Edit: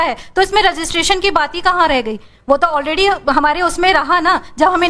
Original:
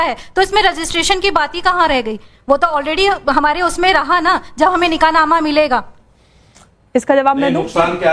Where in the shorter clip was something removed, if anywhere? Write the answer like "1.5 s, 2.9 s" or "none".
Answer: none